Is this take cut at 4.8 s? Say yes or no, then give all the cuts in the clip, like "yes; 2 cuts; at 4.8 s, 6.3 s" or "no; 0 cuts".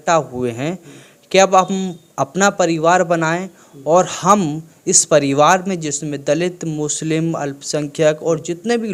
no; 0 cuts